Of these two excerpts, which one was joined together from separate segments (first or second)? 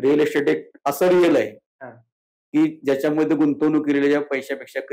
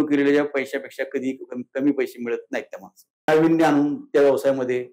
second